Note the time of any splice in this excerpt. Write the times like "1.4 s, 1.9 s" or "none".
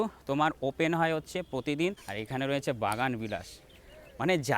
2.1 s

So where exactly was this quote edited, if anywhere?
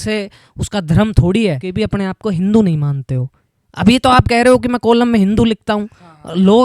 1.7 s

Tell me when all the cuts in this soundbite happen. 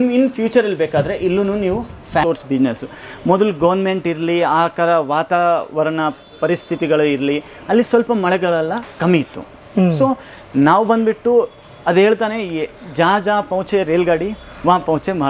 2.2 s

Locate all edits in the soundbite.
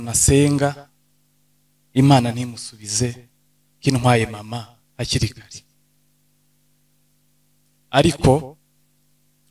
none

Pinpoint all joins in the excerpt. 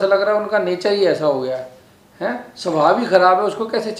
none

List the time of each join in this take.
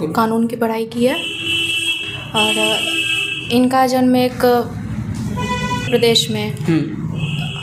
none

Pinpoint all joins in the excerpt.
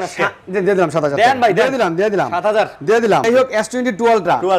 3.2 s

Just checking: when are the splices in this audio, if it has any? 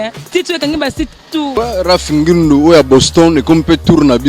1.5 s

